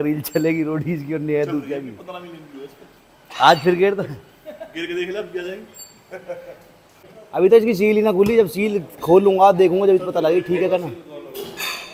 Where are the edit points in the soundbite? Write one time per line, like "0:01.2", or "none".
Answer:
none